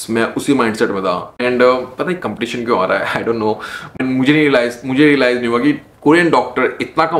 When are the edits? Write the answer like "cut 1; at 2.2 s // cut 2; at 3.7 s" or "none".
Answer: cut 1; at 1.4 s // cut 2; at 4.0 s